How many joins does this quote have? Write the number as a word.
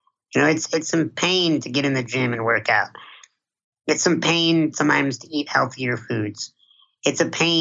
zero